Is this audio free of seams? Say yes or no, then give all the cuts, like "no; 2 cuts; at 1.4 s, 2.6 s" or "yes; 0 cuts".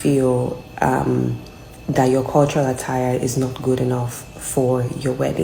yes; 0 cuts